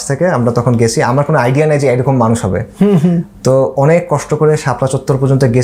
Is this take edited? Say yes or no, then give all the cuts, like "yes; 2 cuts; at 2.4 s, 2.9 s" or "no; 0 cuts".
no; 0 cuts